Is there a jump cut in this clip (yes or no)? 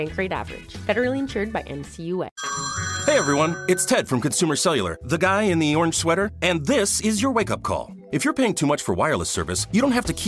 yes